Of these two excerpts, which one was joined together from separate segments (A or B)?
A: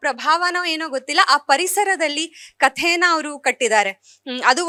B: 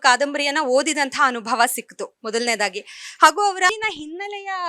B